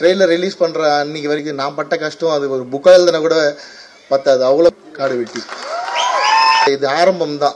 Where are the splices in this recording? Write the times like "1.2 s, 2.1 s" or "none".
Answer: 1.4 s, 4.7 s, 6.6 s

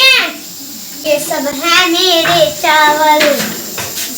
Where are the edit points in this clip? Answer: 0.9 s

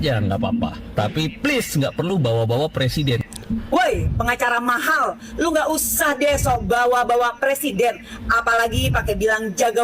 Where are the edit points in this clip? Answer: 3.3 s

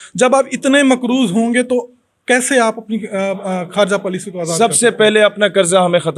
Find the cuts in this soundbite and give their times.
none

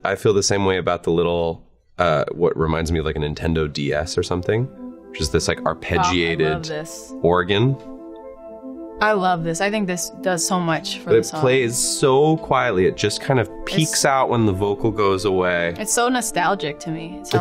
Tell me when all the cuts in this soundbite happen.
none

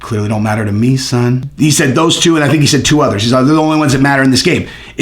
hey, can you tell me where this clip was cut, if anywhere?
1.5 s

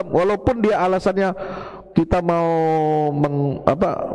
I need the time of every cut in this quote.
none

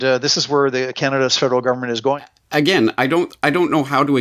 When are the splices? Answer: 2.3 s

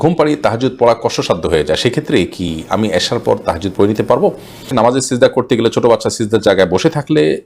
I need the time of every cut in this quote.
4.7 s

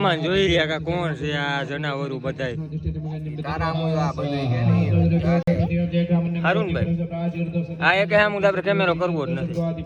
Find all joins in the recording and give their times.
none

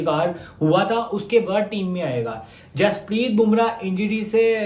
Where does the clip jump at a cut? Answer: none

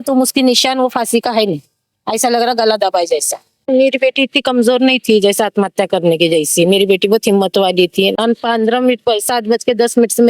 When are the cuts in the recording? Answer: 3.7 s

